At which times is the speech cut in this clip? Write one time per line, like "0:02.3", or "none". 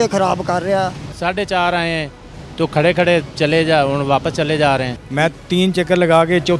0:01.1
0:05.0